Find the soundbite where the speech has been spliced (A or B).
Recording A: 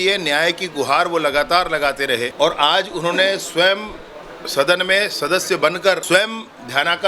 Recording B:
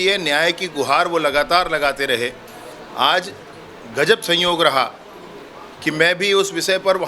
A